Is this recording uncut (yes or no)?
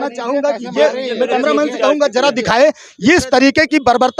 yes